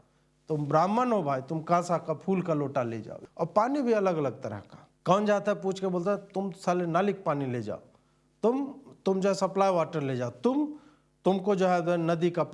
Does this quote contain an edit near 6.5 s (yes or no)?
no